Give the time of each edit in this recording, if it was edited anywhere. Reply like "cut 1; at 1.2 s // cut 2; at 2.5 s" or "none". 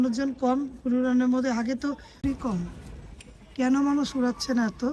cut 1; at 2.2 s